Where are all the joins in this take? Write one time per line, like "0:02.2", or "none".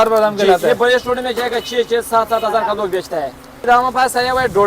0:03.5

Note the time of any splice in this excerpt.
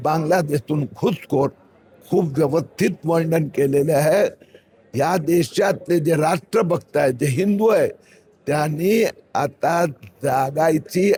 none

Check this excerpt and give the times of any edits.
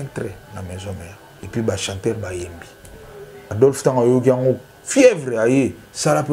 0:01.3
0:03.4

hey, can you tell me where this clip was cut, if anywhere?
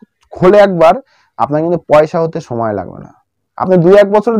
none

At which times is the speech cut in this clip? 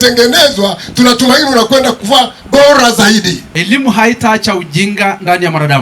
0:03.5

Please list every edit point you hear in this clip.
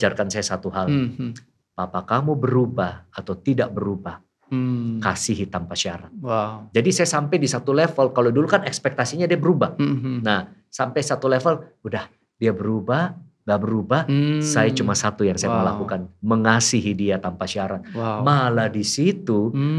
none

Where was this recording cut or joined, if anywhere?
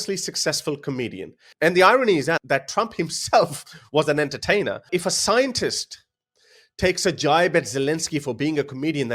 0:01.4

